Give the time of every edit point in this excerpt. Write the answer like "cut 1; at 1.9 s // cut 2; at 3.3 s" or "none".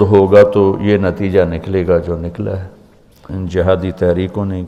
none